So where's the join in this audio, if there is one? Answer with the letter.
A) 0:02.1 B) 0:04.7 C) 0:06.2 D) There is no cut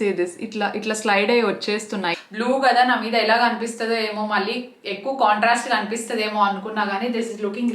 A